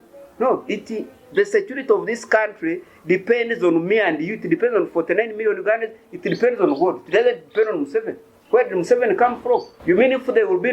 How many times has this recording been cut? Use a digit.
1